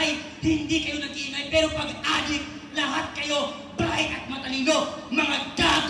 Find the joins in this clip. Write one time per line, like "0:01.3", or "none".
none